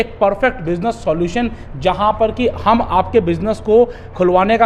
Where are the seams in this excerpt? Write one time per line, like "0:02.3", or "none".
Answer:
none